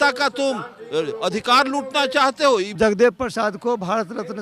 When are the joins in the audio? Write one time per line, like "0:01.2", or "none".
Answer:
0:02.7

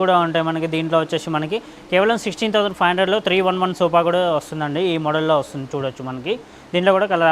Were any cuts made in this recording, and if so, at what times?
none

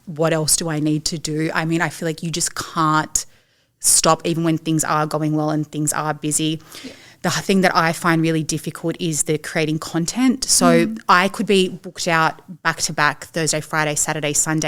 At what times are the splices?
none

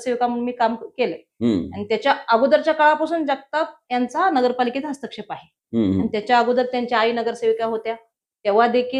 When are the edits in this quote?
none

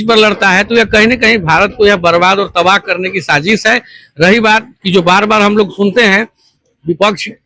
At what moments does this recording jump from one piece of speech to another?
none

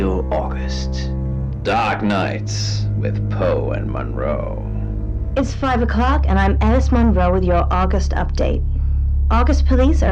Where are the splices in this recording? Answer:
0:01.5

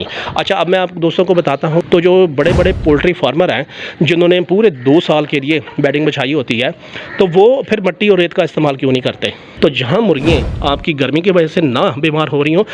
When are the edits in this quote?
0:01.8
0:09.5

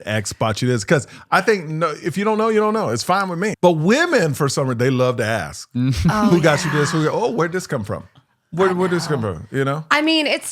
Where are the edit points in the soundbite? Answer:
0:03.5

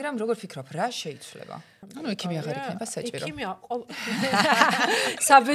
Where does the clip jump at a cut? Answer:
0:01.8

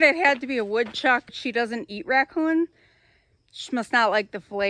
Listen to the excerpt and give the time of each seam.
0:01.3

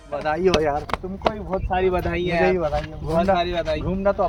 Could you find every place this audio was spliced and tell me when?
none

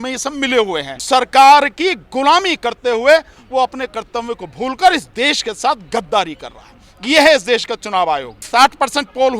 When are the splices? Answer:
0:01.0
0:08.4

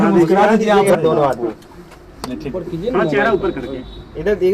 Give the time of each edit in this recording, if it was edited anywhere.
0:00.9

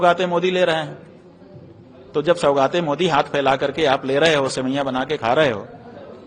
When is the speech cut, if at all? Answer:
none

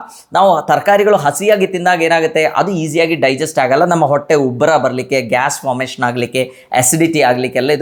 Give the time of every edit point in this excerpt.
none

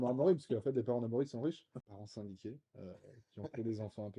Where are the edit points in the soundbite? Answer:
0:01.8

